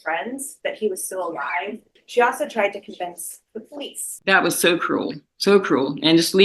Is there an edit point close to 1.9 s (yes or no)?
yes